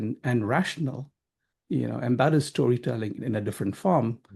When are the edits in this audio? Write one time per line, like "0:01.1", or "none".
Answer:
0:03.2